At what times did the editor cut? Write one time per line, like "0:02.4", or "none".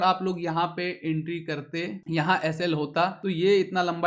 0:02.0
0:03.2